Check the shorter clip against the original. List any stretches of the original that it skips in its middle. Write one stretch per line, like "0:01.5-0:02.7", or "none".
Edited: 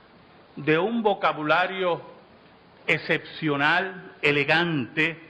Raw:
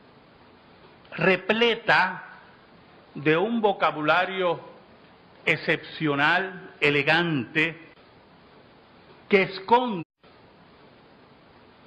none